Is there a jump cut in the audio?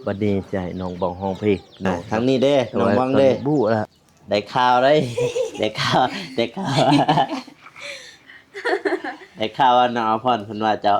yes; 1 cut; at 2.0 s

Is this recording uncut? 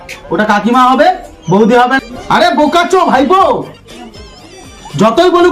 no; 1 cut; at 2.0 s

